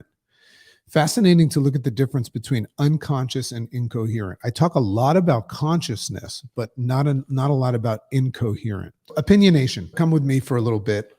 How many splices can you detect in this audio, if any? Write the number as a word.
two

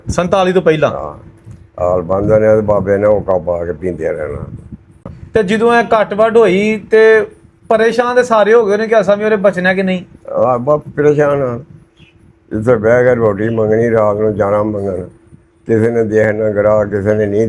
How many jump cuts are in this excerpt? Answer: one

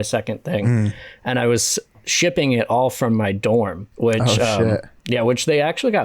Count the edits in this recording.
one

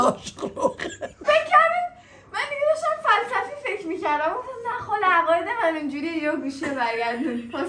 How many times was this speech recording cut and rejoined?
one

